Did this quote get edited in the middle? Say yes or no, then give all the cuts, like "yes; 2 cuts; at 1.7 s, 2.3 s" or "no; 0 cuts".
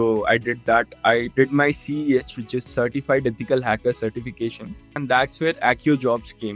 yes; 1 cut; at 5.0 s